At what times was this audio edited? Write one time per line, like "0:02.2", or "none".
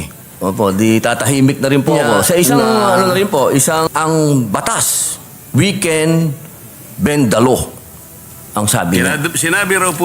0:03.9
0:09.2